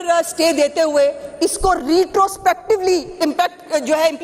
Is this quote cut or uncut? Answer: uncut